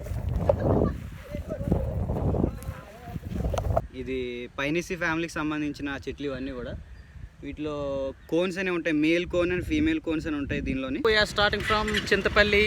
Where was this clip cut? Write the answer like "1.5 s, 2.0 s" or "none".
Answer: 3.9 s, 11.0 s